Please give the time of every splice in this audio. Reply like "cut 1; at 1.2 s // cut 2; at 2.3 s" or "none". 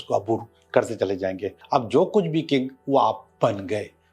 cut 1; at 1.6 s